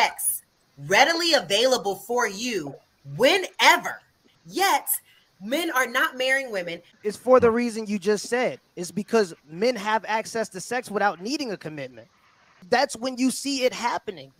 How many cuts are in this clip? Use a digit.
2